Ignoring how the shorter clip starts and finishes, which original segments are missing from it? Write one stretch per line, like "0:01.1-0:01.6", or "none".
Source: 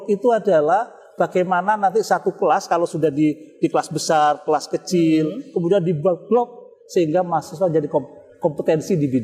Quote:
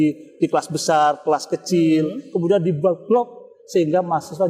none